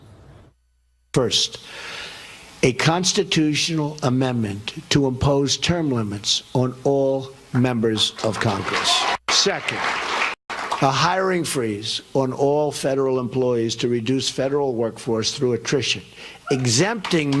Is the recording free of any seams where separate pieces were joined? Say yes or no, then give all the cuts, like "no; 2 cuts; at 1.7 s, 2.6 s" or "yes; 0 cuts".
no; 1 cut; at 4.8 s